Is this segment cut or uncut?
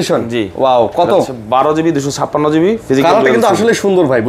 uncut